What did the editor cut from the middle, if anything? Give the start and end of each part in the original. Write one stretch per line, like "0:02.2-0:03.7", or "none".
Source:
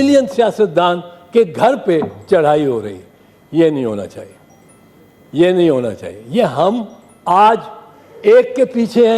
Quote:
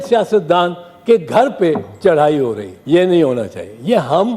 0:03.0-0:05.2